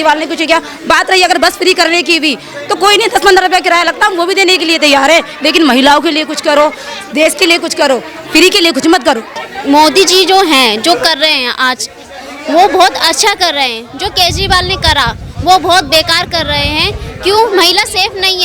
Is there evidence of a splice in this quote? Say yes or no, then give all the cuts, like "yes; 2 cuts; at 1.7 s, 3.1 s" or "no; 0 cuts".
no; 0 cuts